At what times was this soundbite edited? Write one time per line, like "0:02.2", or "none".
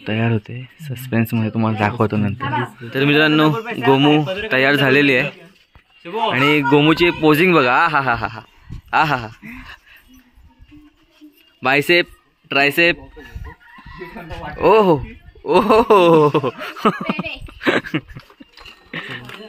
0:02.8